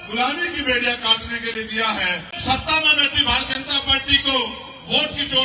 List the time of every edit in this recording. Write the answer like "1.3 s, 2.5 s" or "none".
2.3 s